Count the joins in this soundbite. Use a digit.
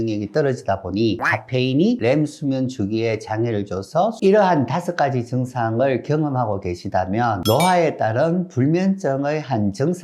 2